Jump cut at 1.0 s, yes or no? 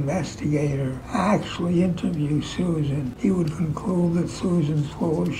yes